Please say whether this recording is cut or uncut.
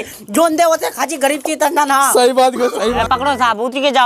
cut